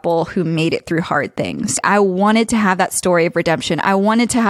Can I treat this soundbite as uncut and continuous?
yes; 0 cuts

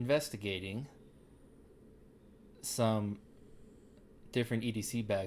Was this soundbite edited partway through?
no; 0 cuts

